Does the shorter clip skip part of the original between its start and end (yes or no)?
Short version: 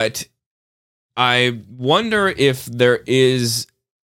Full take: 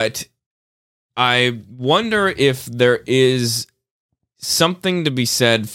no